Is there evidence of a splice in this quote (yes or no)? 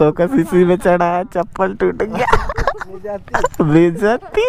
no